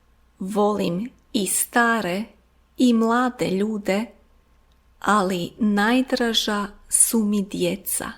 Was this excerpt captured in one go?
yes; 0 cuts

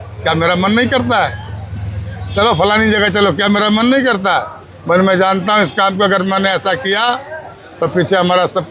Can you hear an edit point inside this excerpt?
no; 0 cuts

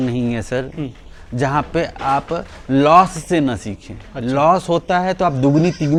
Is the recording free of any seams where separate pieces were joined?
yes; 0 cuts

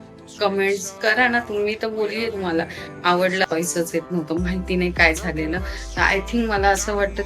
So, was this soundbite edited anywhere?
yes; 1 cut; at 3.5 s

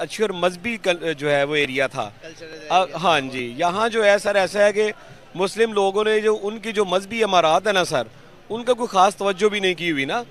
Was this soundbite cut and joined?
no; 0 cuts

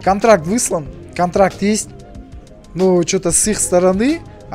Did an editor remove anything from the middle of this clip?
no; 0 cuts

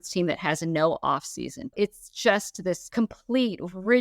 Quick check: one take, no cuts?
no; 2 cuts; at 1.6 s, 2.8 s

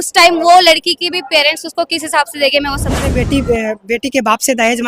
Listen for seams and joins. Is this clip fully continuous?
no; 1 cut; at 3.1 s

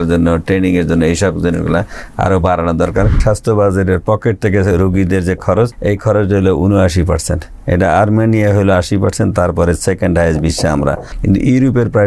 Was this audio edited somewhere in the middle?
yes; 3 cuts; at 3.2 s, 5.8 s, 11.1 s

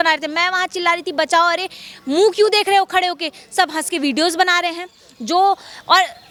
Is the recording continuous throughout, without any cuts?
yes; 0 cuts

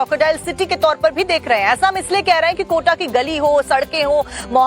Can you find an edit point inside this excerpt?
yes; 1 cut; at 3.7 s

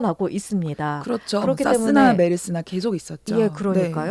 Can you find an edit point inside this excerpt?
no; 0 cuts

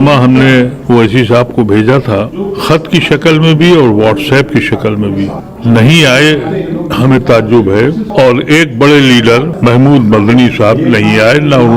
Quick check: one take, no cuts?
no; 4 cuts; at 2.3 s, 5.5 s, 8.1 s, 9.5 s

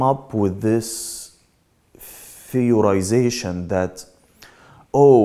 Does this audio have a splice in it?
no; 0 cuts

